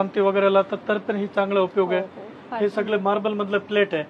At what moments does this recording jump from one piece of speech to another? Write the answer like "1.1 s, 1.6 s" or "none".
none